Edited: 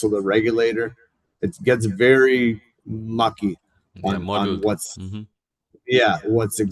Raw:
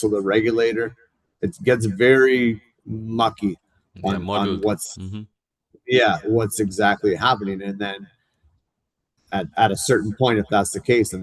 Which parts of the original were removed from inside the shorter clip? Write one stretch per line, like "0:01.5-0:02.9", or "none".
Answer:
none